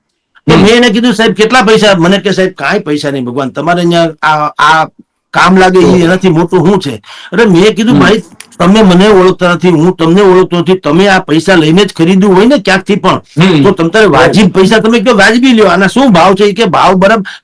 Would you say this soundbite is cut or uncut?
uncut